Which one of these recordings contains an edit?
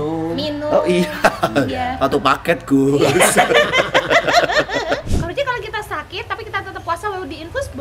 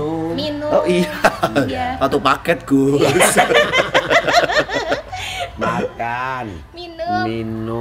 first; 1 cut; at 5.1 s

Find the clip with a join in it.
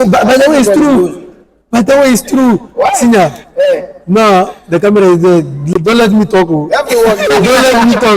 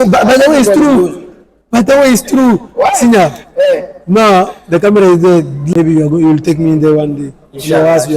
second; 1 cut; at 5.6 s

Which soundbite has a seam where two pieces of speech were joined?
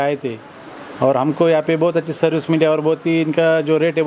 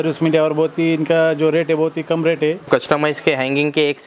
second; 1 cut; at 2.7 s

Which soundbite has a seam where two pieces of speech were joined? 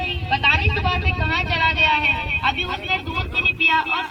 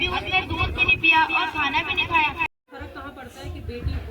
second; 1 cut; at 2.5 s

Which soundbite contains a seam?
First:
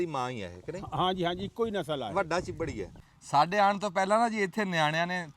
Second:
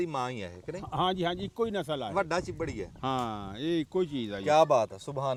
first; 1 cut; at 2.9 s

